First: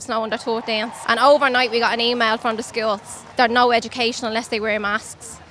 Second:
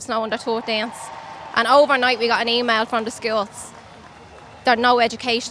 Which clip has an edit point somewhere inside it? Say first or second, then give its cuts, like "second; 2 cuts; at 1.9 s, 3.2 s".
first; 2 cuts; at 1.0 s, 3.2 s